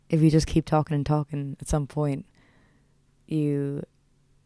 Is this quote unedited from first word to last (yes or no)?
yes